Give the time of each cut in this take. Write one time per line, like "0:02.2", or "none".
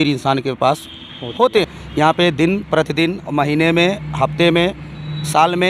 0:01.8